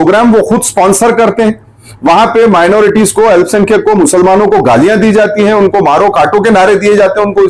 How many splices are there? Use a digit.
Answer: 0